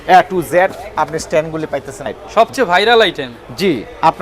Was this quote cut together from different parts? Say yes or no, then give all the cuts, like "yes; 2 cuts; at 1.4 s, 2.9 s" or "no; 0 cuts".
yes; 1 cut; at 2.2 s